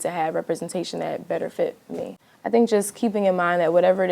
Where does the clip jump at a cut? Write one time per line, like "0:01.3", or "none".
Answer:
0:02.1